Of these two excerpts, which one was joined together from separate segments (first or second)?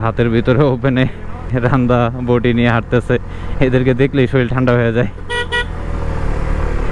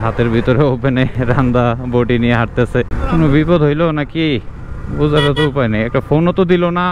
second